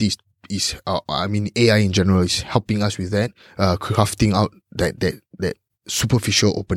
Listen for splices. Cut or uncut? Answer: uncut